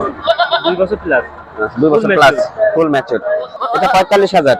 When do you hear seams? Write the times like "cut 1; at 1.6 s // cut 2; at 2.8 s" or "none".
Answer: cut 1; at 3.5 s